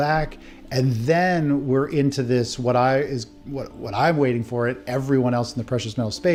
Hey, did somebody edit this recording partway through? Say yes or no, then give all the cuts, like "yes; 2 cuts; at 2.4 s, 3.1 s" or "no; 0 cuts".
no; 0 cuts